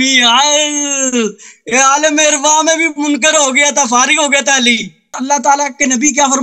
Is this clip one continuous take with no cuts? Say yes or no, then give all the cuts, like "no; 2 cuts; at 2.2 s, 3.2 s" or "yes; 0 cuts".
no; 1 cut; at 5.2 s